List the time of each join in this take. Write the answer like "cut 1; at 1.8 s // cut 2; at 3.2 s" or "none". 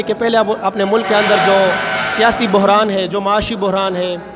none